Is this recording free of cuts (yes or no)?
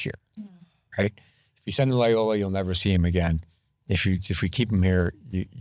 yes